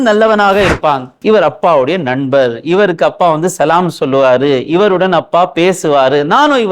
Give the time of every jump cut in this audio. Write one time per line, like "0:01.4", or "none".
0:01.1